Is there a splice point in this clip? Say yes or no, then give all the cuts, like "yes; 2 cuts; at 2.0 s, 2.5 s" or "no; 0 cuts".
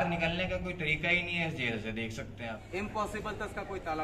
yes; 1 cut; at 2.6 s